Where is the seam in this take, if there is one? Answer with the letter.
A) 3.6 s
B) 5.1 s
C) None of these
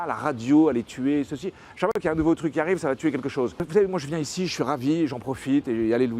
A